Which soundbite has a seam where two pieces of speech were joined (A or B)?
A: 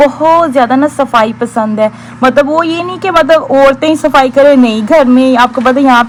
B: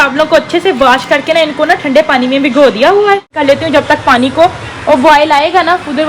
B